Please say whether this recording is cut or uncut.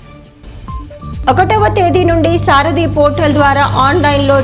cut